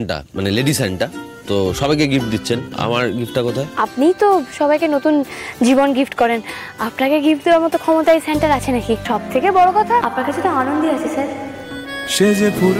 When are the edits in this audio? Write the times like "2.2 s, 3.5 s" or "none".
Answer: 2.7 s, 3.7 s, 9.0 s, 10.0 s